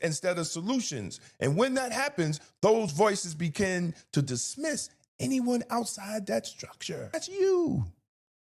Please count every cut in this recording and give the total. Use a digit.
1